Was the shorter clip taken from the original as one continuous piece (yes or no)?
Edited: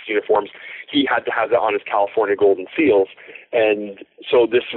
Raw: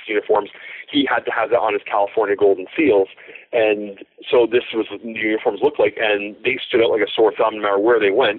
yes